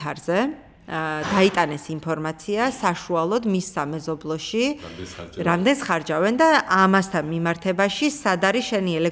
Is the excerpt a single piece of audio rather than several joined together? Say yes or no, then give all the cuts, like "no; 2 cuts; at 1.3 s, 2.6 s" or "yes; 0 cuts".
yes; 0 cuts